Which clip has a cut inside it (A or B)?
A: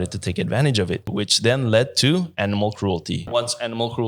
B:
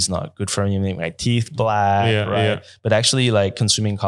A